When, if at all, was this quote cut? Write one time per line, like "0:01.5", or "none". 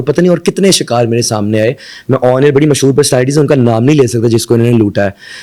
none